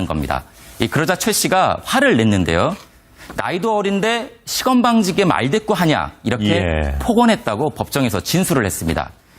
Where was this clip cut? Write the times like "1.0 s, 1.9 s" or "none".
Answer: 1.8 s